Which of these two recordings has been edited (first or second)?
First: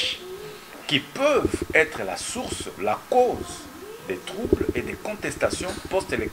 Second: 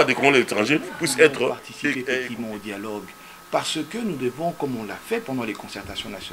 second